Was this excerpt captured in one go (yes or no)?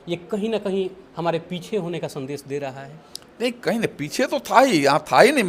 yes